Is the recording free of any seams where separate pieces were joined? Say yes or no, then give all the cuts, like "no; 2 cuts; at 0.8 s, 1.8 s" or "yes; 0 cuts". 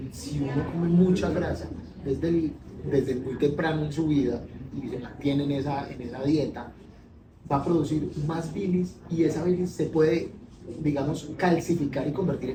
yes; 0 cuts